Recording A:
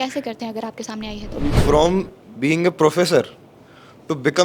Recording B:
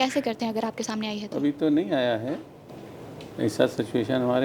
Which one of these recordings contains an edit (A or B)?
A